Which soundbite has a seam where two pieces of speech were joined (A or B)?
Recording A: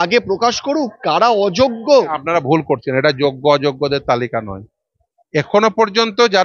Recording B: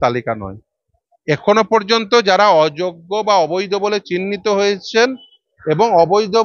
A